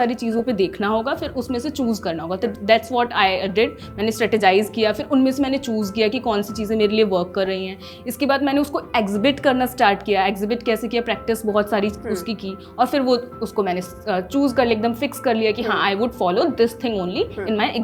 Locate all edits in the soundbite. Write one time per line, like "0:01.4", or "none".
none